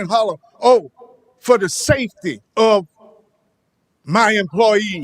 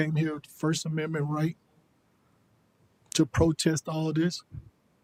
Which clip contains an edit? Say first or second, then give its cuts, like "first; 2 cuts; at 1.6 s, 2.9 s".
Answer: first; 1 cut; at 2.4 s